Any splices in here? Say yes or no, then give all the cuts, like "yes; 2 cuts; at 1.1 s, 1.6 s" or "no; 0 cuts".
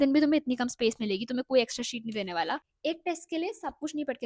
yes; 1 cut; at 2.7 s